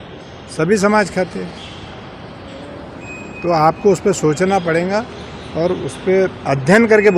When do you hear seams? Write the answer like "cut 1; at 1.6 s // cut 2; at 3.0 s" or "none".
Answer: none